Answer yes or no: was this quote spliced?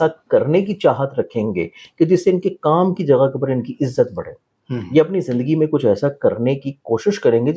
no